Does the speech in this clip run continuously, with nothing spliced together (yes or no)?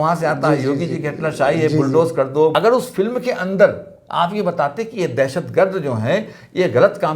no